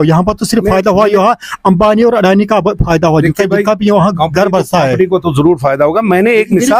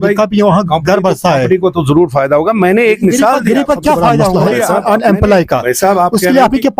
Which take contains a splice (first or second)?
second